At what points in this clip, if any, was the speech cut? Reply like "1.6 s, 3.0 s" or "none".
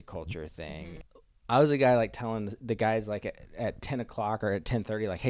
1.2 s